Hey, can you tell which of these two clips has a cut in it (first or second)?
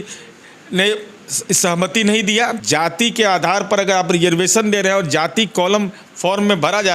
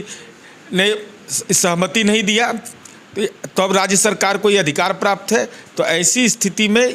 first